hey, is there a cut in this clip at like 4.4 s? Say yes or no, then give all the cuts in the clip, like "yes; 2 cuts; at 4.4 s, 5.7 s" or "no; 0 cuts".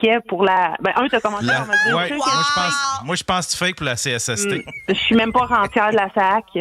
yes; 1 cut; at 4.4 s